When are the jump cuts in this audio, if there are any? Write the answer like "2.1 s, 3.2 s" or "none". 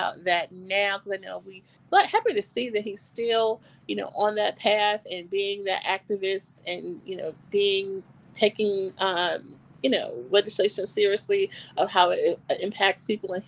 1.8 s